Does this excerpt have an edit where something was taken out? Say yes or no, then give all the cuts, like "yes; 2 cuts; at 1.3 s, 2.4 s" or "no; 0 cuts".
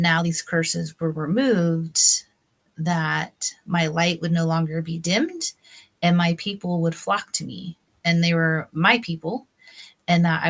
no; 0 cuts